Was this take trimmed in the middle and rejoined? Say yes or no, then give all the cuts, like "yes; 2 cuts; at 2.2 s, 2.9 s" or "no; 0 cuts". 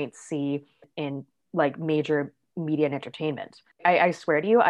yes; 2 cuts; at 1.1 s, 3.8 s